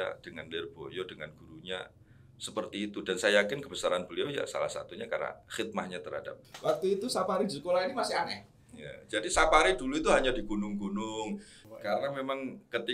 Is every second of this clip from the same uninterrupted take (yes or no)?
no